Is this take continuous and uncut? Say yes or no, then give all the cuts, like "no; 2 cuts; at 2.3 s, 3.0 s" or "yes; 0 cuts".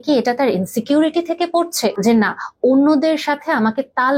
no; 1 cut; at 2.0 s